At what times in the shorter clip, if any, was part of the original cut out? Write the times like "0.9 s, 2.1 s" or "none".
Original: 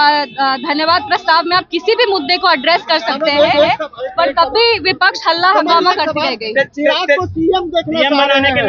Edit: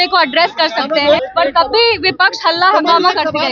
1.2 s